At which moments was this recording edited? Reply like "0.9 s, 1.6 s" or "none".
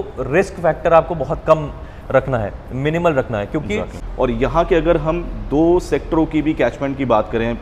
4.0 s